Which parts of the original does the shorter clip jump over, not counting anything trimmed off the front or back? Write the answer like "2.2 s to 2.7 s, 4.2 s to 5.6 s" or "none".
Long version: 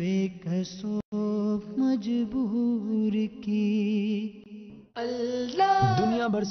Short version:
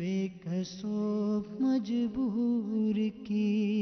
1.0 s to 1.1 s